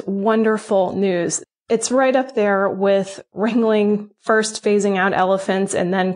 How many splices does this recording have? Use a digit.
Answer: 1